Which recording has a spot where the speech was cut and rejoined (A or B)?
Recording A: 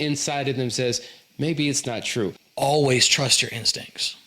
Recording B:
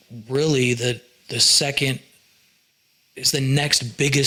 A